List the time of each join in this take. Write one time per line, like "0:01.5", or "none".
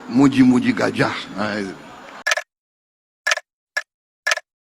0:02.1